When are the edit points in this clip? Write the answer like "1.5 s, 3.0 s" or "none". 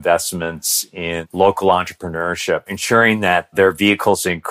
1.3 s, 2.7 s

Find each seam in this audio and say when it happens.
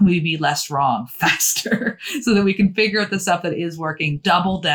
none

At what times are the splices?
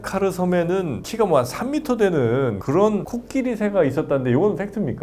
2.6 s

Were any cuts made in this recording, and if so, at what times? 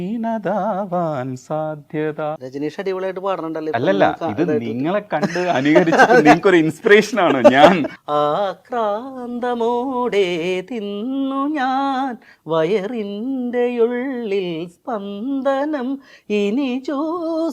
2.4 s, 7.9 s

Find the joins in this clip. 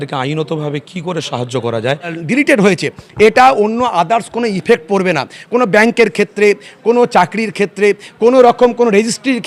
2.2 s

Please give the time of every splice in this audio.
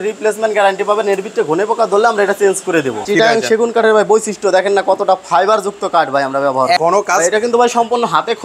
3.0 s, 6.8 s

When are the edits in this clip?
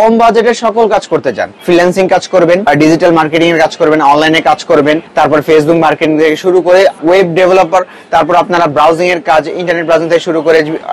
1.5 s, 2.6 s, 5.1 s, 7.0 s

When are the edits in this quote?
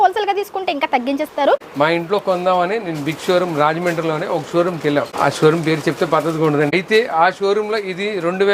1.7 s, 5.1 s, 6.7 s

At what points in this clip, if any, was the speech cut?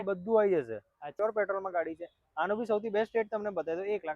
1.1 s

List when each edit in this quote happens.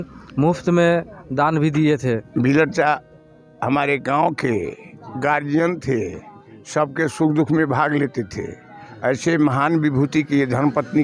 2.3 s

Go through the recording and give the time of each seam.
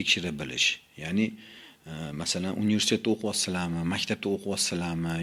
none

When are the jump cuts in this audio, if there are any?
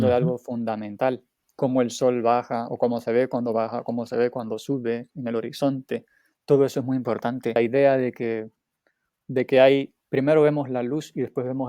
1.4 s, 7.6 s

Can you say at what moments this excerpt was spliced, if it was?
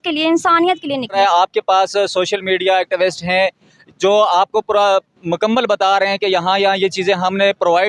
1.1 s

